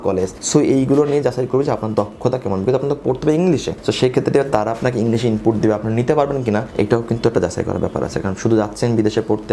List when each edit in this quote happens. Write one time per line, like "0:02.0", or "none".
none